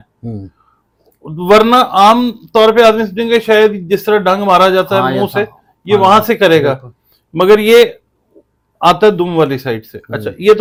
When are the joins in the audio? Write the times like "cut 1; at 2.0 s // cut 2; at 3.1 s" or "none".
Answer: none